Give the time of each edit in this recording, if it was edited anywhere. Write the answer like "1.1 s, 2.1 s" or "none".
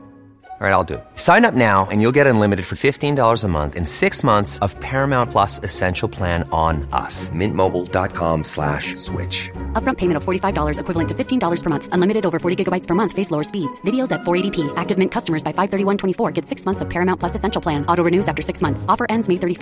none